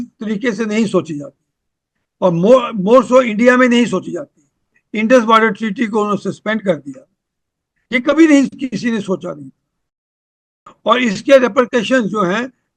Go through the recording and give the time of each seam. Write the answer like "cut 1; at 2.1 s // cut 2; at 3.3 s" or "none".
cut 1; at 4.8 s